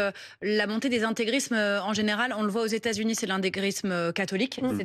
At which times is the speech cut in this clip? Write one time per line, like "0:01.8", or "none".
none